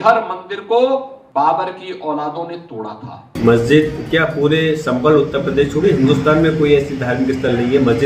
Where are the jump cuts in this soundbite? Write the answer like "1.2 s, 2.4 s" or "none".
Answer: 1.2 s, 3.2 s